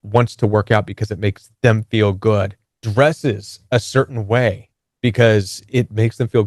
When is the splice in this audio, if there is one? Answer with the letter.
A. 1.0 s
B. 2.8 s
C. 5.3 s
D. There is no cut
B